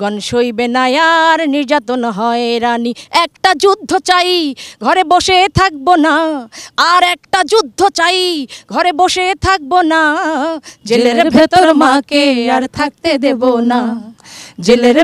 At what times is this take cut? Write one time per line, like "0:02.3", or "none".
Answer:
none